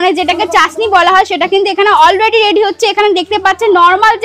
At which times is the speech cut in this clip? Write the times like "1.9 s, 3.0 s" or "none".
none